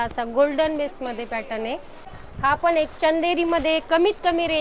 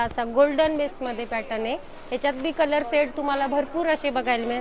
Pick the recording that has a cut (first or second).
first